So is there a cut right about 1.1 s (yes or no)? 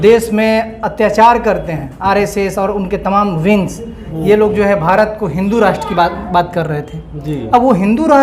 no